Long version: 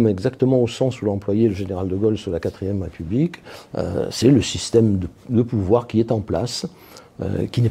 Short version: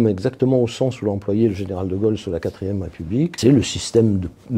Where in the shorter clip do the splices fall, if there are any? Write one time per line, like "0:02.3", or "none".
0:03.4